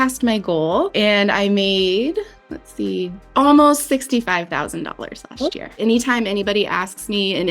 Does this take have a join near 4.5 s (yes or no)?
no